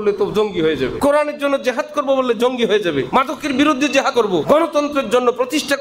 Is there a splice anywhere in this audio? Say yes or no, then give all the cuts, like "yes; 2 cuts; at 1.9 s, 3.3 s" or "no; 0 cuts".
yes; 3 cuts; at 1.0 s, 3.1 s, 4.2 s